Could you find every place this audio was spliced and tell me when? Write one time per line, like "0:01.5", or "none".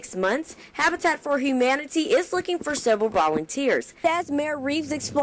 0:04.0